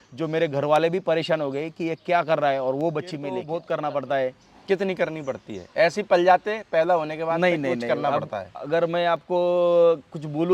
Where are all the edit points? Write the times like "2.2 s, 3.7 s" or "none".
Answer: 3.4 s

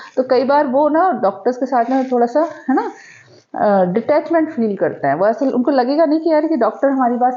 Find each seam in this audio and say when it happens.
none

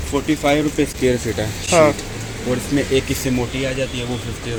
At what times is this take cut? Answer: none

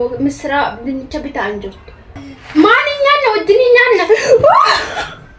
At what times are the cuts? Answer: 2.3 s

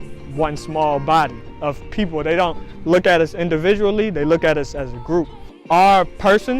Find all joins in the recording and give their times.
5.5 s

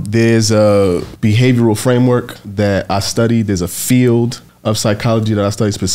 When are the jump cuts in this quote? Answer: 1.1 s, 2.4 s, 4.5 s

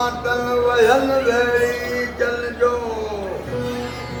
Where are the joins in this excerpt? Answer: none

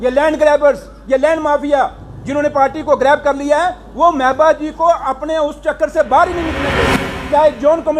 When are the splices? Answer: 6.7 s

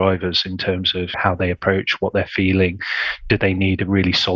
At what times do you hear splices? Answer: 1.2 s

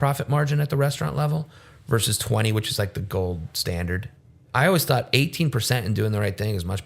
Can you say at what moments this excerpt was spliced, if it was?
4.2 s

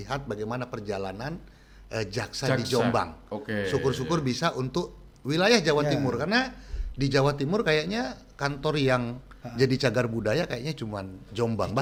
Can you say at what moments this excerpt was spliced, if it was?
none

